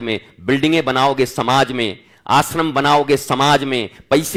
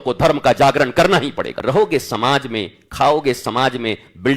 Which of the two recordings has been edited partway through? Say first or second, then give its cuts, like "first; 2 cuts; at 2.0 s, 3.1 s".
second; 1 cut; at 1.5 s